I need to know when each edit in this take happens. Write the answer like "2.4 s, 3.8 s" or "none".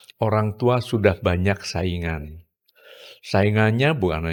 none